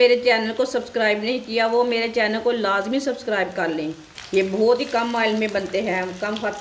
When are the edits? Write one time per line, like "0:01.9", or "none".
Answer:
0:04.1